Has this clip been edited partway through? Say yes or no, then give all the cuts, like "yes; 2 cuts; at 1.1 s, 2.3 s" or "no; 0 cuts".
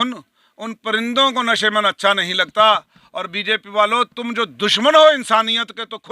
no; 0 cuts